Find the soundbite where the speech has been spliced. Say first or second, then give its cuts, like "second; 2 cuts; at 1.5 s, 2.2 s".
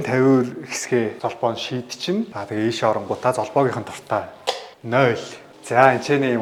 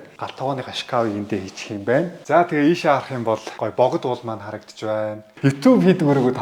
second; 3 cuts; at 2.2 s, 3.5 s, 5.3 s